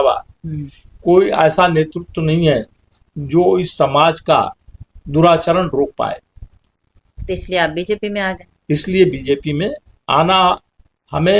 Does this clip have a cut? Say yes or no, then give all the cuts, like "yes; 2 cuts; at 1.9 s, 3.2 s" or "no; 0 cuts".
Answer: no; 0 cuts